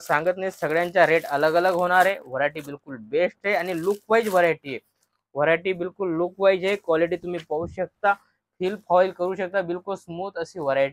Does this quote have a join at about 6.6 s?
no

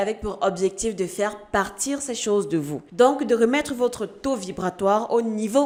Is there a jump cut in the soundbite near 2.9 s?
no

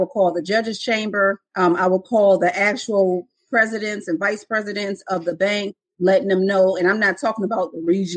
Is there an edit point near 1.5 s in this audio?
yes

